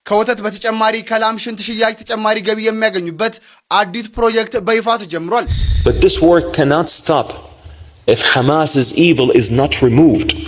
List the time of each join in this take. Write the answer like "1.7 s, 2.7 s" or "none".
5.6 s